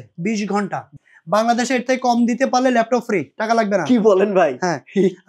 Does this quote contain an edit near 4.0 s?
no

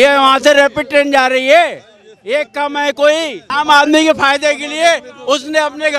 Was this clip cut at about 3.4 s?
yes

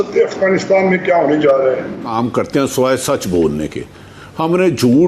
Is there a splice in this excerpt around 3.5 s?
no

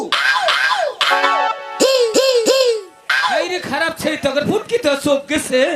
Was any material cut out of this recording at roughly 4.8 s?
no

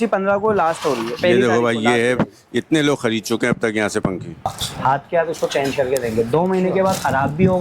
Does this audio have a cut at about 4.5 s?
yes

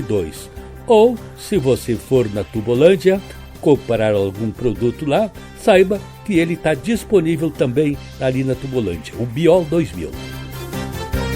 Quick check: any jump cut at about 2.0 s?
no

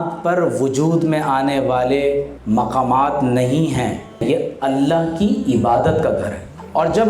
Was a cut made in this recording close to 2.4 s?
no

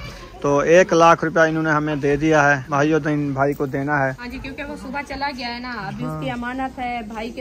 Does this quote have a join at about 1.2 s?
no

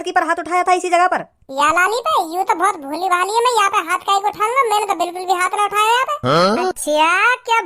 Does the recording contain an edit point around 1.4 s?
yes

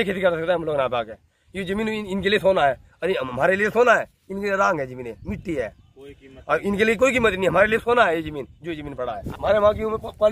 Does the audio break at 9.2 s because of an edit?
yes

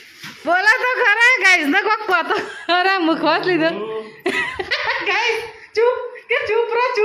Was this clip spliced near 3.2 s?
no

